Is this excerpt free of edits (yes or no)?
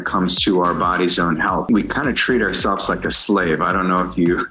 no